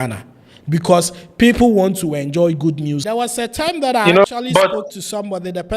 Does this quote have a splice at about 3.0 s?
yes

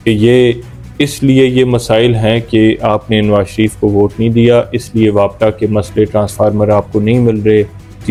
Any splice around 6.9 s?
no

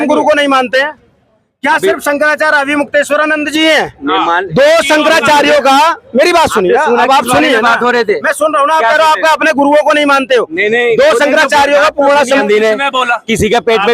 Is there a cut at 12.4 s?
yes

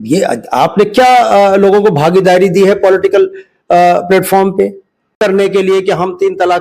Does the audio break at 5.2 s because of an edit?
yes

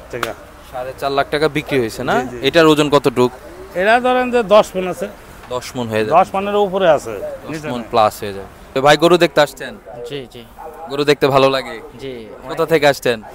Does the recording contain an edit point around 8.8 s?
yes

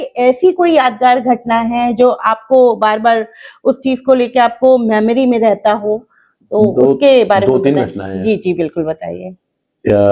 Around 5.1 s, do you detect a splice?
no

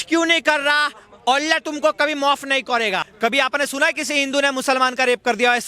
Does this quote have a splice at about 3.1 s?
yes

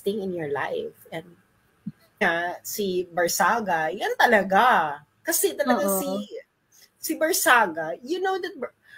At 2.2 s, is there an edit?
yes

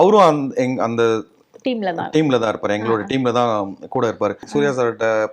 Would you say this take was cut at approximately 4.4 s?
yes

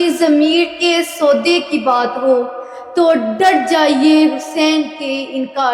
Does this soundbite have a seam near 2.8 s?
no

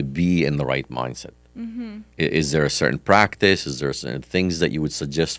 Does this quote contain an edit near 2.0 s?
yes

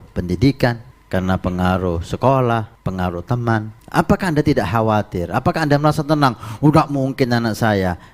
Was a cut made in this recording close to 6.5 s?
no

